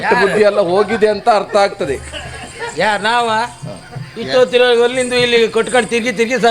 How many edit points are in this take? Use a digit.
0